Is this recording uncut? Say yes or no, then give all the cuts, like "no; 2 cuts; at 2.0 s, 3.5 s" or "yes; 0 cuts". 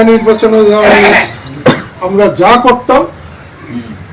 yes; 0 cuts